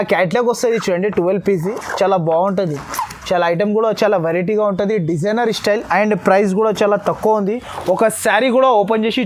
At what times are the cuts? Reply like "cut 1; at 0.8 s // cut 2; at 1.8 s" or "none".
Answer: none